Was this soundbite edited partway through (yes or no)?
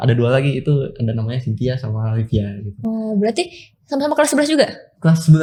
no